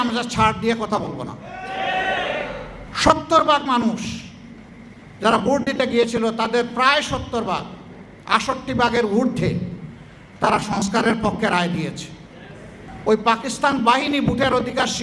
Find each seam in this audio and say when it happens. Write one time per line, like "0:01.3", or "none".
0:02.8
0:12.8